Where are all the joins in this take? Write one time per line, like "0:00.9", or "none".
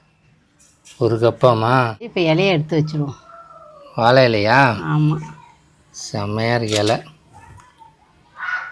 0:02.0